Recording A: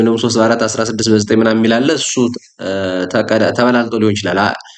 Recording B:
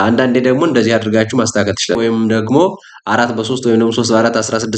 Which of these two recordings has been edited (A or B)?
B